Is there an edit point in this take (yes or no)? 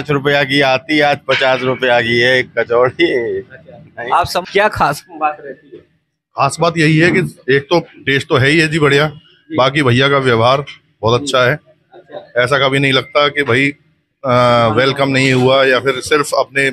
yes